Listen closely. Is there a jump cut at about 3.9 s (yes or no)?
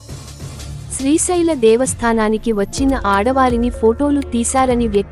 no